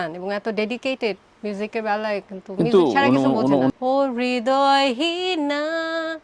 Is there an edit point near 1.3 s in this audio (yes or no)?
yes